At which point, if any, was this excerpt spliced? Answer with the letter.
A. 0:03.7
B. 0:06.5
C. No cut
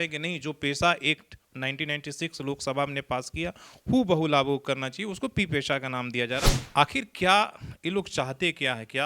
B